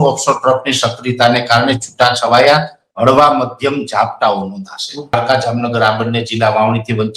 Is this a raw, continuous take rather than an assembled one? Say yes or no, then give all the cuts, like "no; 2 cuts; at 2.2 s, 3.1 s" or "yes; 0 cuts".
no; 1 cut; at 5.1 s